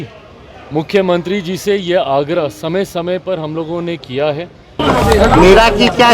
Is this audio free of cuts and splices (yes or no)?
no